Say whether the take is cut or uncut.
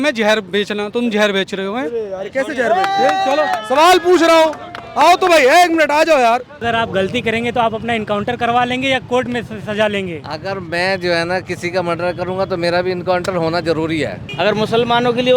cut